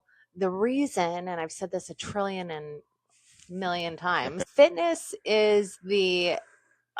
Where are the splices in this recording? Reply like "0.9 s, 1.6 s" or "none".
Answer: 4.4 s